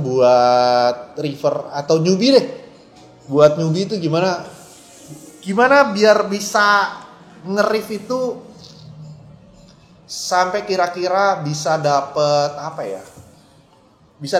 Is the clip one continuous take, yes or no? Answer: yes